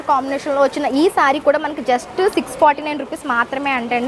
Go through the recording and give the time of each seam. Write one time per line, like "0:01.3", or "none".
none